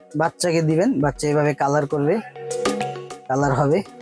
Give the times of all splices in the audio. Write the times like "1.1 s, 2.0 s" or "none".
none